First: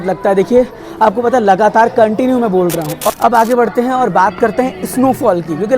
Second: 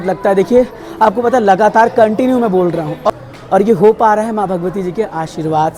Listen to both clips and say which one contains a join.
first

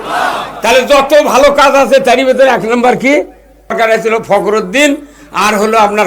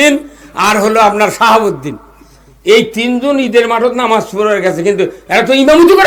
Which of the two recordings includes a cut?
first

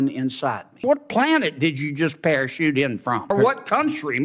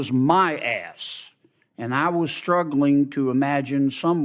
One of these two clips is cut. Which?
first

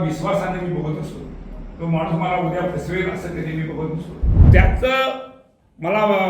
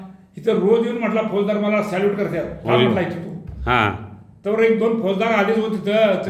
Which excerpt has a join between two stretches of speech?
first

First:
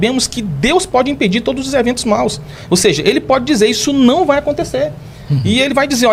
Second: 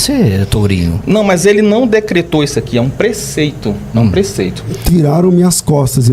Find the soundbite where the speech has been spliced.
second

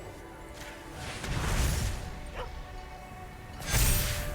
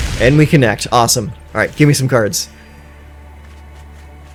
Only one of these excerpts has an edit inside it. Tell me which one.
first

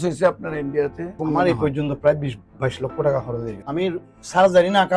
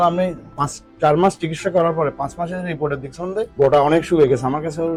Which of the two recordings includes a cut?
first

